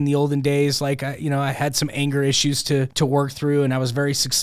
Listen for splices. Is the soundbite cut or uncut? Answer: cut